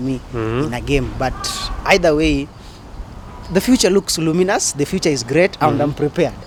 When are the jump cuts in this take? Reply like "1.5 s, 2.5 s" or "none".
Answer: none